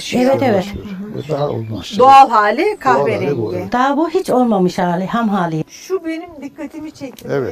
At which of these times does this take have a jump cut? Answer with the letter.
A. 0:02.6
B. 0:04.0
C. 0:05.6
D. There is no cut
C